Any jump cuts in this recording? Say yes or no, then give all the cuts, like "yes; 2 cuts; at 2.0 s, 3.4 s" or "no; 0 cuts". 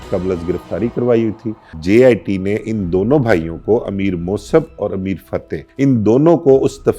yes; 2 cuts; at 1.8 s, 5.6 s